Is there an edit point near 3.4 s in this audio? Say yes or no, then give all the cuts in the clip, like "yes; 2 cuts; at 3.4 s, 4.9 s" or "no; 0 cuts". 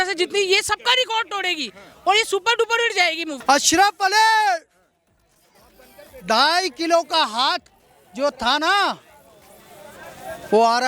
yes; 1 cut; at 3.4 s